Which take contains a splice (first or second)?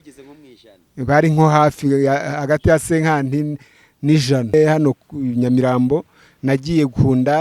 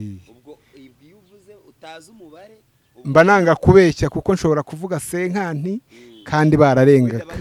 first